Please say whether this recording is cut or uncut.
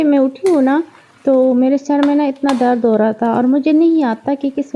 uncut